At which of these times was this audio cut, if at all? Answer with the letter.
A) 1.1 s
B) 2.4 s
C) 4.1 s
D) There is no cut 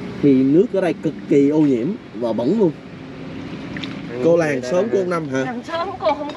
C